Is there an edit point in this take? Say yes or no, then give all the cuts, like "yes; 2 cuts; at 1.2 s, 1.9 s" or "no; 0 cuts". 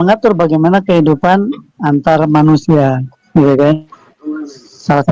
no; 0 cuts